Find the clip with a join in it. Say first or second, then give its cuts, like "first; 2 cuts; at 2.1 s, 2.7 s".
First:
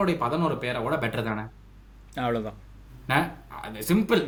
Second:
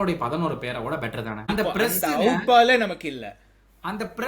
second; 1 cut; at 1.5 s